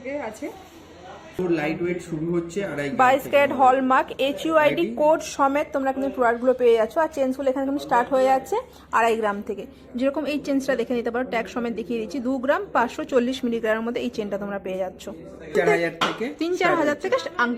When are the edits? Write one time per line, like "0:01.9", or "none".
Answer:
0:01.4
0:15.5